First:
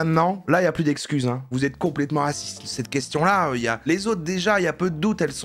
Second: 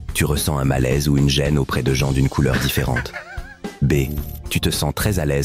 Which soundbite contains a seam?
first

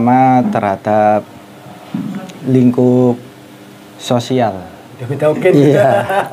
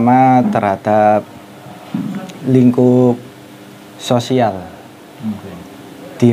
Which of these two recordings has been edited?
first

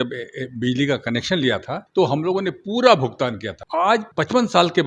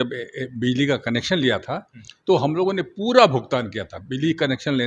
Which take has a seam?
first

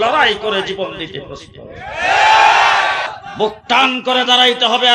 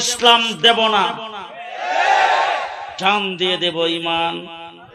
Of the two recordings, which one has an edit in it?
first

